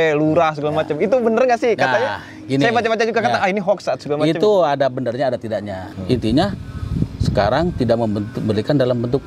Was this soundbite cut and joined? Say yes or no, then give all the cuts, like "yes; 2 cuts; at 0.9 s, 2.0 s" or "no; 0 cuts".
yes; 1 cut; at 5.9 s